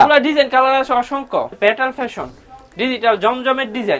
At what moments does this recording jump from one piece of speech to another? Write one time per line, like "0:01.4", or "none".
0:01.5